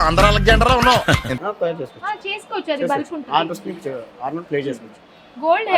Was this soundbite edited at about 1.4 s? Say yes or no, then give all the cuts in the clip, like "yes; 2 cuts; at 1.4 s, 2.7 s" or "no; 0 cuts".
no; 0 cuts